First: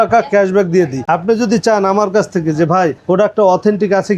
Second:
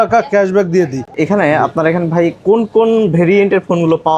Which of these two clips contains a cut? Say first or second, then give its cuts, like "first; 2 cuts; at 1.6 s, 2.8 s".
first; 1 cut; at 1.0 s